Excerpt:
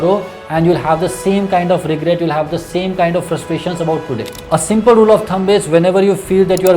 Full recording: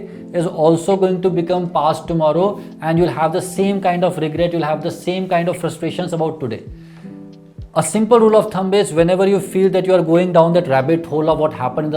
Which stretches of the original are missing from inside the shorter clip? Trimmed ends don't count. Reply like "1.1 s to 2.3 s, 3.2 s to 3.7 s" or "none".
6.7 s to 7.6 s